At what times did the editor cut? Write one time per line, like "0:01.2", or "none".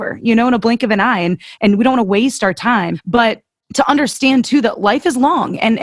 0:03.2